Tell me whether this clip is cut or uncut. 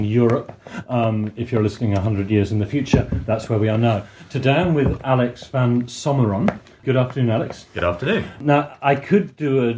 cut